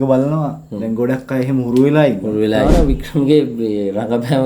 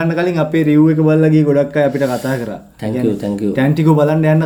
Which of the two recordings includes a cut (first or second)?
first